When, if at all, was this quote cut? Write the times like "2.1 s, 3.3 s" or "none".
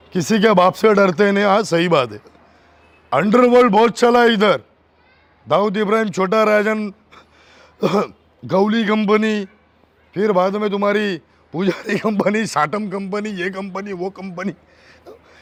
none